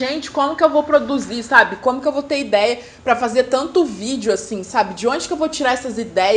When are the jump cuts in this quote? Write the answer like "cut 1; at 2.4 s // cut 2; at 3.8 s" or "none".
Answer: none